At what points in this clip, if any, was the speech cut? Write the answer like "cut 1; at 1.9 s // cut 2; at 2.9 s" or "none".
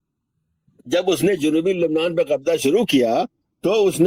none